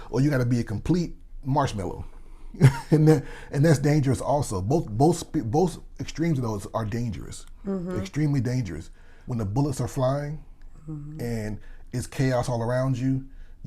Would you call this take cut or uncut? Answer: cut